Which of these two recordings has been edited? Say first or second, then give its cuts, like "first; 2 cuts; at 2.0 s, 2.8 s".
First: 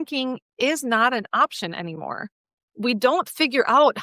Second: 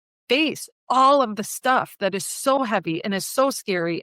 first; 1 cut; at 2.7 s